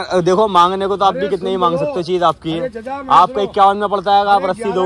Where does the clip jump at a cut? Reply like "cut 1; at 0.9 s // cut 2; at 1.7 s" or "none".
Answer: none